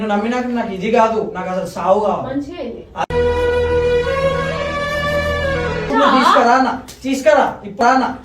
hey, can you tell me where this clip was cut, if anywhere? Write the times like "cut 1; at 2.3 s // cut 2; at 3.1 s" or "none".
cut 1; at 5.9 s